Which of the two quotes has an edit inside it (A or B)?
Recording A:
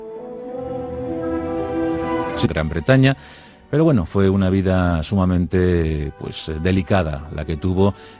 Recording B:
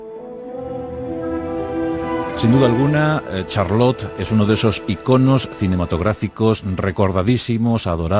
B